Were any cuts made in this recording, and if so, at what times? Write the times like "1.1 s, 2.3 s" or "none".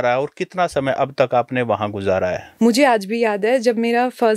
2.4 s